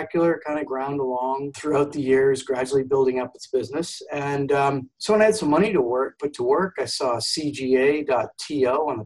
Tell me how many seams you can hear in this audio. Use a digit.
0